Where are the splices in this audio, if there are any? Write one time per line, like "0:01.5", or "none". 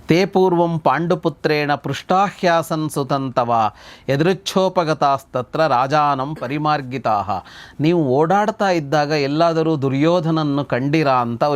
none